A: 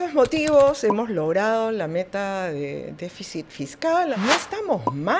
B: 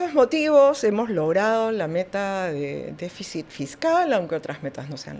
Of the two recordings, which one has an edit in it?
A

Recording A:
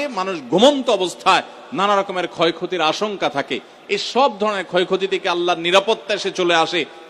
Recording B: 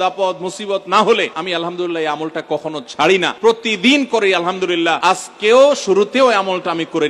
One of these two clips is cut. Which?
B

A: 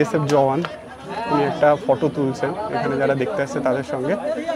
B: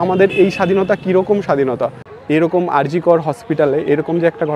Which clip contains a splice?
B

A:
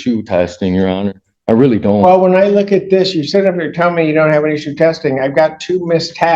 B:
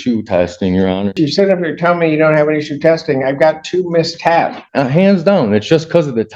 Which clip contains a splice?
B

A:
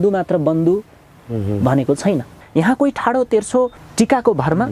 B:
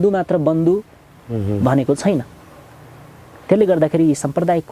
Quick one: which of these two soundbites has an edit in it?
A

